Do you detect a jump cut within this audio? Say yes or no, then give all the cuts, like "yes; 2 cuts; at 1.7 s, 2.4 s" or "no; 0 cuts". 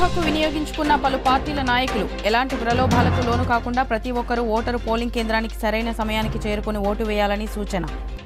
no; 0 cuts